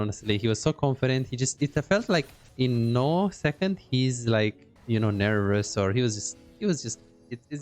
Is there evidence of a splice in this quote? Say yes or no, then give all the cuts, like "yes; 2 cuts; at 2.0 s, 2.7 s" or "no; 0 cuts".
yes; 1 cut; at 2.4 s